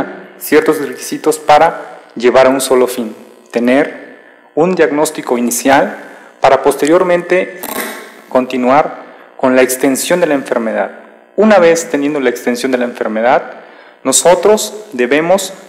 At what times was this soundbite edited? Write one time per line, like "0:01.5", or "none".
0:01.8